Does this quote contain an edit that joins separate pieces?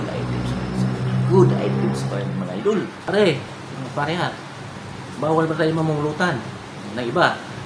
yes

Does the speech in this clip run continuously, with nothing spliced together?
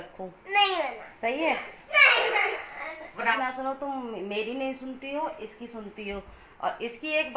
no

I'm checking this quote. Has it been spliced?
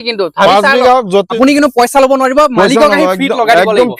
yes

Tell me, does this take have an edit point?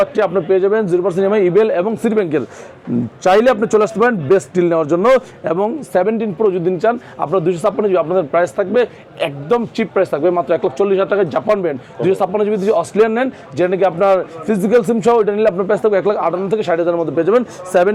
no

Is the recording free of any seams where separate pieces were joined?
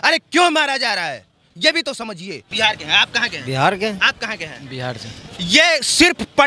no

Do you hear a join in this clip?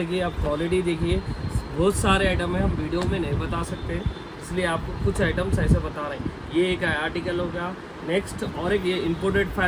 no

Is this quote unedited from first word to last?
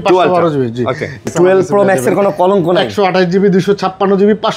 no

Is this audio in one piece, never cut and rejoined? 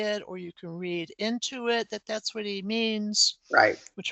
yes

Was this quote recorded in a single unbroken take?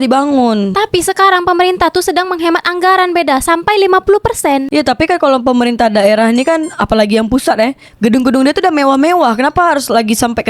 no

